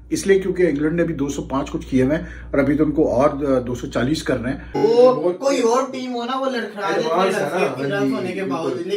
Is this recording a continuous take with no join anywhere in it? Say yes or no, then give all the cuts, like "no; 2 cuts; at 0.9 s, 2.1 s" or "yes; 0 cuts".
no; 1 cut; at 4.8 s